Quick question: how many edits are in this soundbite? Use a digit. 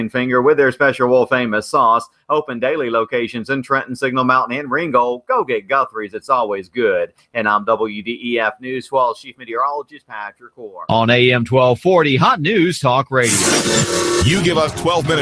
1